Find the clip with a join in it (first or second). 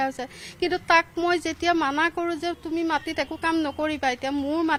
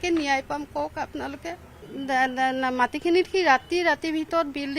second